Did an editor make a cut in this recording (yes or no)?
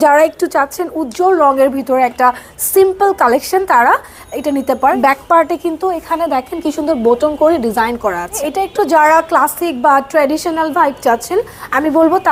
yes